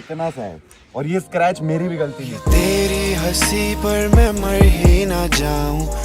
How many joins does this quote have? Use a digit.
1